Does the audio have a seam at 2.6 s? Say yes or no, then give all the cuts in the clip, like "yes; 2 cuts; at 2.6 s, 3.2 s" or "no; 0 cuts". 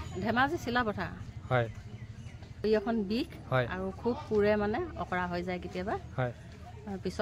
yes; 1 cut; at 2.6 s